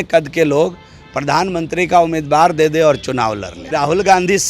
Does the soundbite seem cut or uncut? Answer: cut